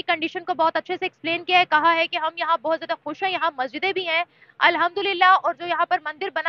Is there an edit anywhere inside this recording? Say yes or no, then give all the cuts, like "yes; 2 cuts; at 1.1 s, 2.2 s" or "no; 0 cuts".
no; 0 cuts